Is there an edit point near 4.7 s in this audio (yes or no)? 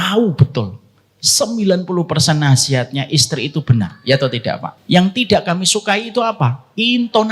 yes